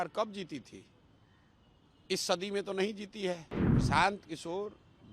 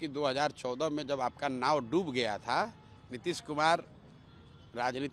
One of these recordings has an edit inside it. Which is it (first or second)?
first